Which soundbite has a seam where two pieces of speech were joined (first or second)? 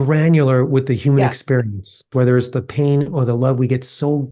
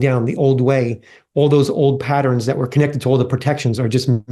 first